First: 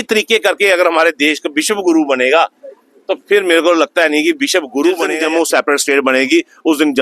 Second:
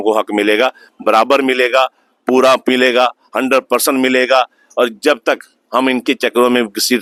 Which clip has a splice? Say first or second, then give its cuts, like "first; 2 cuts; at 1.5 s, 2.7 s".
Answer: first; 1 cut; at 5.1 s